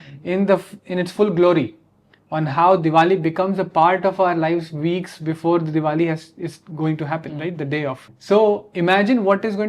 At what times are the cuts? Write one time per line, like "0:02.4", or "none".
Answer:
0:08.1